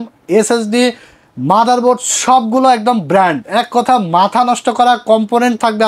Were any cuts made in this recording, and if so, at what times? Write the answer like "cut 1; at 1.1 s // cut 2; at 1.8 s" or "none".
none